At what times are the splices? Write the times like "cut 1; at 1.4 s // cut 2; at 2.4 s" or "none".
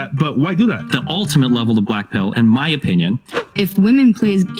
cut 1; at 1.0 s // cut 2; at 3.4 s